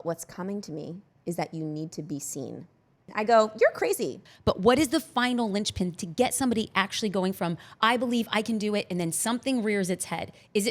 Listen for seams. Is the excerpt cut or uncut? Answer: cut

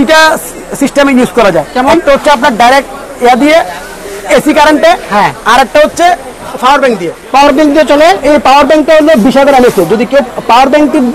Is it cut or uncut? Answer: uncut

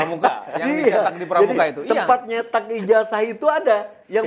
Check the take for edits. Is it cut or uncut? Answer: uncut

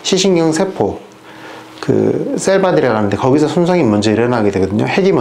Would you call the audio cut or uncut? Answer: uncut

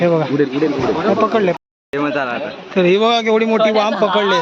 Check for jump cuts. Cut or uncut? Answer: cut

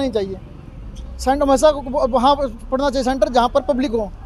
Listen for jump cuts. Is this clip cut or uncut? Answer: uncut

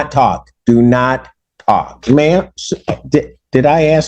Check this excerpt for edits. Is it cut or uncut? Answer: cut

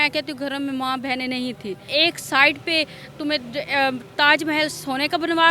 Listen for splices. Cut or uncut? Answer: cut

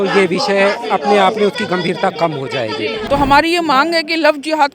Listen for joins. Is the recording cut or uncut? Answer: cut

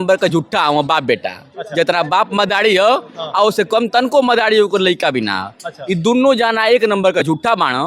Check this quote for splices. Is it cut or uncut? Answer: uncut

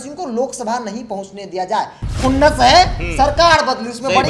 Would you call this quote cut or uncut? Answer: uncut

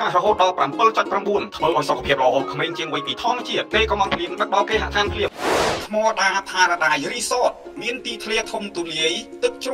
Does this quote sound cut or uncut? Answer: uncut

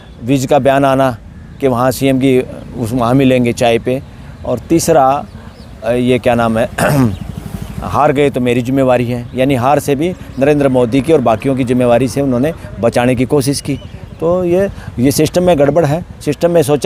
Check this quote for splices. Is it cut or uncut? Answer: uncut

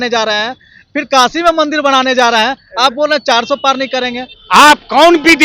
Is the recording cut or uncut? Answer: cut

